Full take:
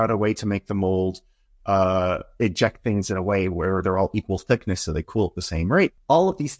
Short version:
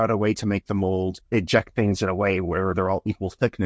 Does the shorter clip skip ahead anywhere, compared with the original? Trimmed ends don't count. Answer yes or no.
yes